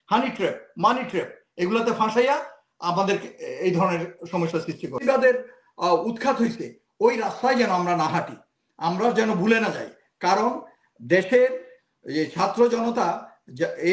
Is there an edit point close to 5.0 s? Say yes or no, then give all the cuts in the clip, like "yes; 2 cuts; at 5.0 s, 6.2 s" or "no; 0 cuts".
yes; 1 cut; at 5.0 s